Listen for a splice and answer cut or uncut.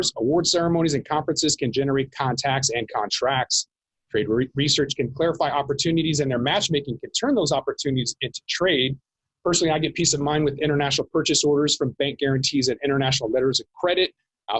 uncut